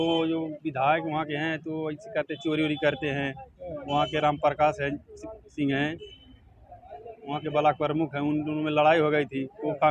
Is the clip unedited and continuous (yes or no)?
yes